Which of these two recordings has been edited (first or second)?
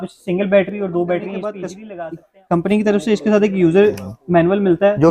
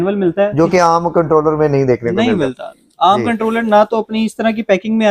first